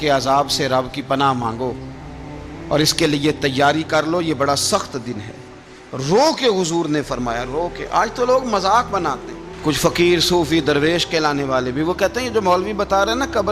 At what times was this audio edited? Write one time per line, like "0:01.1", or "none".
none